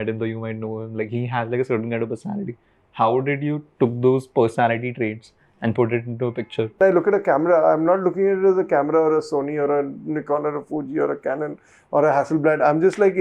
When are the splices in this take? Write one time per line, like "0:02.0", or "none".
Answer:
0:06.8